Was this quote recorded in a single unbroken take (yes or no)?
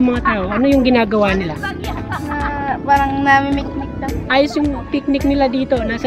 yes